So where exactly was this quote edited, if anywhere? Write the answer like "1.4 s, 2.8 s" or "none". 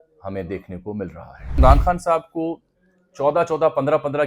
1.5 s